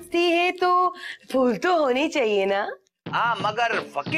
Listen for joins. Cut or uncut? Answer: uncut